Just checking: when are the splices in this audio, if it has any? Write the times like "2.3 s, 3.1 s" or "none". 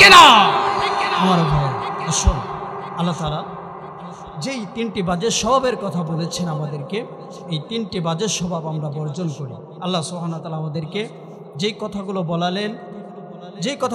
none